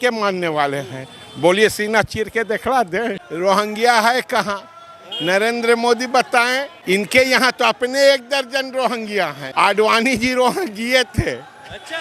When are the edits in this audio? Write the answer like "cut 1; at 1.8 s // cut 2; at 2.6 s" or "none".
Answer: cut 1; at 3.2 s // cut 2; at 6.7 s // cut 3; at 9.4 s